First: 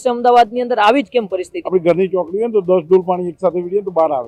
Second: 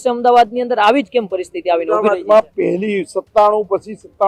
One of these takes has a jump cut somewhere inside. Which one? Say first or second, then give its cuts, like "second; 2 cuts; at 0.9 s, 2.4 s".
first; 1 cut; at 1.5 s